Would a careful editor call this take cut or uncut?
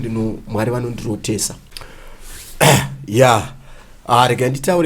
cut